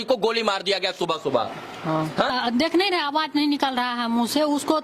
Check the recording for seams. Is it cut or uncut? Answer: cut